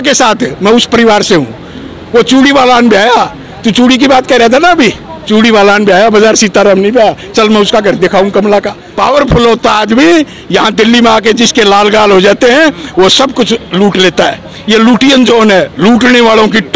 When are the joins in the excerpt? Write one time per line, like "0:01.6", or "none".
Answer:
0:08.8